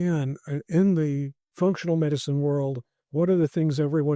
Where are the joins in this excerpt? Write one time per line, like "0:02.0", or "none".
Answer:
0:01.4